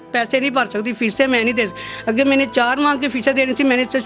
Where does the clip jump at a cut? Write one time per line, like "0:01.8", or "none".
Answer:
none